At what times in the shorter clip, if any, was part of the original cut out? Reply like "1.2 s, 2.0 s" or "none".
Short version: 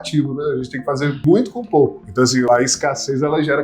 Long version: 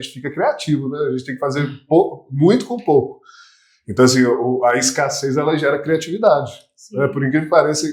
1.2 s, 2.4 s